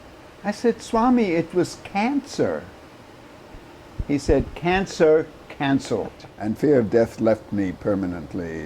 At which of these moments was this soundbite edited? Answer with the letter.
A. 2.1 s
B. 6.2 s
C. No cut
B